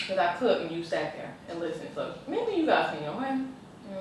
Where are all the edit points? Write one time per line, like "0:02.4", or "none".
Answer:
none